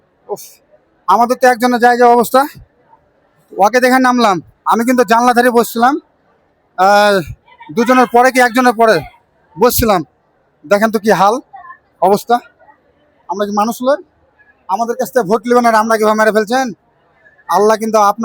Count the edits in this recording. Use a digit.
0